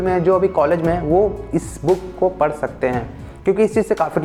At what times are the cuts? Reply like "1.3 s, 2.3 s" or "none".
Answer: none